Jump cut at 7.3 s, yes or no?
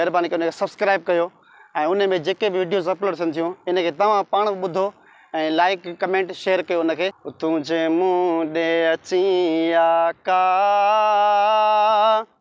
yes